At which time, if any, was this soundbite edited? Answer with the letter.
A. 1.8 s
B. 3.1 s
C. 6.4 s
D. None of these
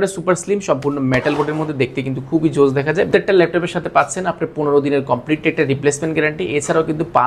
B